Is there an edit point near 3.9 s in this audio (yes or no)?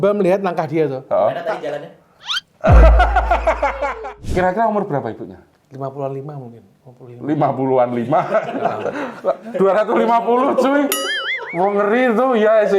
yes